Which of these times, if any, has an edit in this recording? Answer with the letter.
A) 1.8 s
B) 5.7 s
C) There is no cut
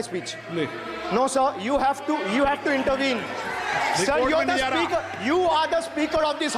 C